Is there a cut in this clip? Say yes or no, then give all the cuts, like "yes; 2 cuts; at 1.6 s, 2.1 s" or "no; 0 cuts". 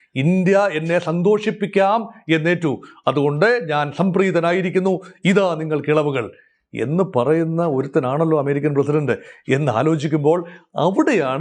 no; 0 cuts